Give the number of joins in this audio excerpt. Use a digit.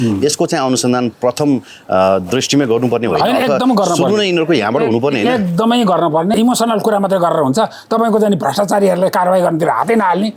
1